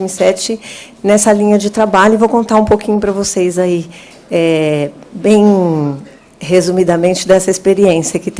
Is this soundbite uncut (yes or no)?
yes